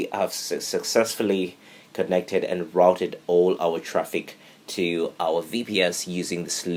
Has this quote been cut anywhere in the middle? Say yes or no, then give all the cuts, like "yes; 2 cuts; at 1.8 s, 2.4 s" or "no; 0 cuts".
no; 0 cuts